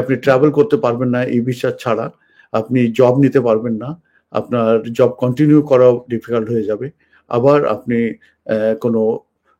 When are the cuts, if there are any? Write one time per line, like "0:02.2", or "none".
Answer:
none